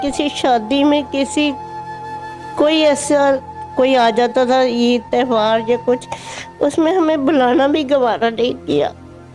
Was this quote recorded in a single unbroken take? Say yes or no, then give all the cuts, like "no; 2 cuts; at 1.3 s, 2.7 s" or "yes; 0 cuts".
yes; 0 cuts